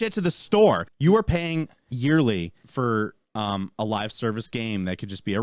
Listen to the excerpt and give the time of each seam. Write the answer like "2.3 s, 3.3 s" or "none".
0.9 s, 2.6 s, 3.2 s